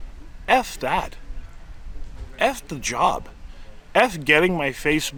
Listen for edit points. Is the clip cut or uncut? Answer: uncut